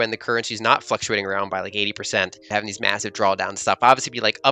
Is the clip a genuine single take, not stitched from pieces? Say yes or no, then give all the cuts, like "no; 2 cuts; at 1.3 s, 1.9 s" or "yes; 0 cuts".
no; 1 cut; at 2.5 s